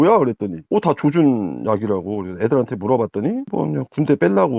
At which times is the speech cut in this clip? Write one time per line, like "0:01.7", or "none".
none